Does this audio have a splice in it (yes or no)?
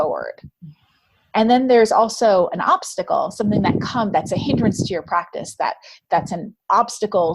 yes